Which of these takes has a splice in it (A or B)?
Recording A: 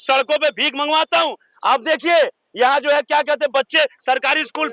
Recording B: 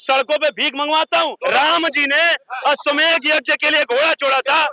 B